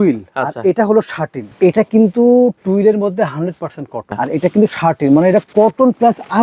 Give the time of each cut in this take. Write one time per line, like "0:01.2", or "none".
0:01.6
0:04.2